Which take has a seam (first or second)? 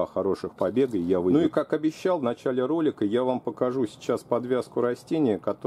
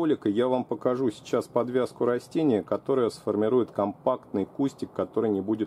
first